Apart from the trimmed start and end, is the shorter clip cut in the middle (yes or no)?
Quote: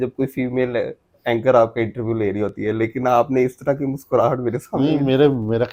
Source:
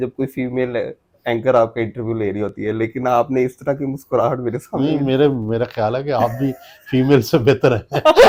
no